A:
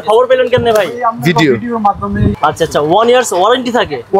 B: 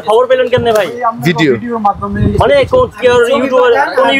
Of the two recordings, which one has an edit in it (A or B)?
A